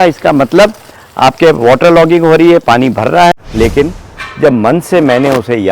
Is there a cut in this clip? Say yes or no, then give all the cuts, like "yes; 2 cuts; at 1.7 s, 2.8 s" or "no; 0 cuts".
yes; 1 cut; at 3.3 s